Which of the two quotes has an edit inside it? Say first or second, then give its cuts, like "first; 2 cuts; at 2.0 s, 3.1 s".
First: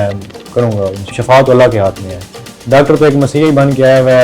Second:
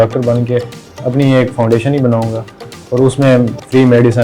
first; 1 cut; at 1.1 s